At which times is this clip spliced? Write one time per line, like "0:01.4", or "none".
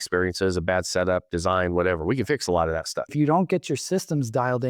0:03.1